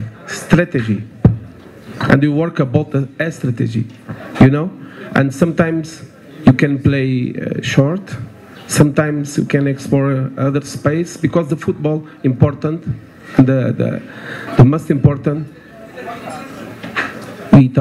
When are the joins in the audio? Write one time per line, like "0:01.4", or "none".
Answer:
none